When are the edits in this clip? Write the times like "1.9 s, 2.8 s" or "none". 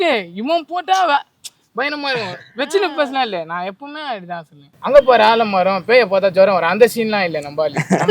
4.7 s